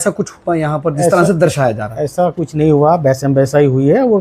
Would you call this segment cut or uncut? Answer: uncut